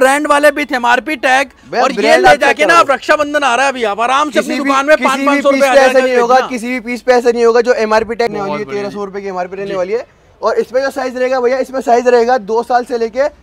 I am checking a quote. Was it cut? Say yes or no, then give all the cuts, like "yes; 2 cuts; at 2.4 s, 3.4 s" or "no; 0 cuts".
yes; 1 cut; at 8.3 s